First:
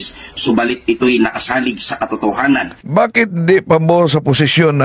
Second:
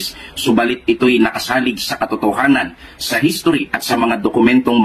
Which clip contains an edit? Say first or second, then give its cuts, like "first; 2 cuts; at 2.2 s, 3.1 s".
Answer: second; 1 cut; at 2.8 s